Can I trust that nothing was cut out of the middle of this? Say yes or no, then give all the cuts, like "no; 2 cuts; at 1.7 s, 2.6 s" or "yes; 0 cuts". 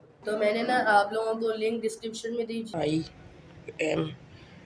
no; 1 cut; at 2.7 s